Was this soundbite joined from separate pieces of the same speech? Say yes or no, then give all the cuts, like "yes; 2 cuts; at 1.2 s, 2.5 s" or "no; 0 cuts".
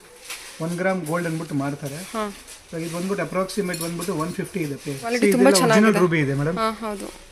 yes; 1 cut; at 5.1 s